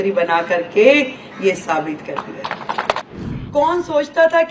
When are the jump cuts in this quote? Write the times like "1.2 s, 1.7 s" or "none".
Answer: 3.0 s